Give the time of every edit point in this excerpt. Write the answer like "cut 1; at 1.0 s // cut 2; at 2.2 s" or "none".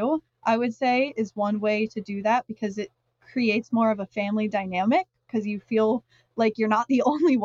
none